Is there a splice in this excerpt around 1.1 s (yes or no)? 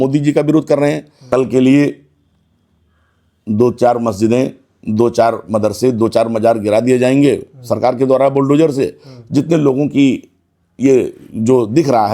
yes